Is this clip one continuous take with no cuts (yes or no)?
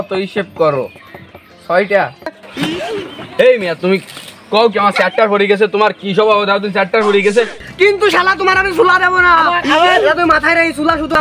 no